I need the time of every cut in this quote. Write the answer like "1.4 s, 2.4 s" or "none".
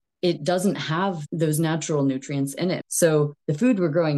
1.2 s, 2.8 s

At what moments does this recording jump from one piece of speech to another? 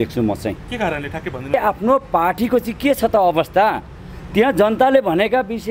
1.5 s

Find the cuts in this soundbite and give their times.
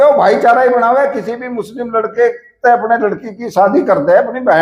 none

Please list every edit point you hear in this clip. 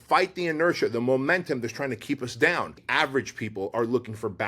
2.8 s

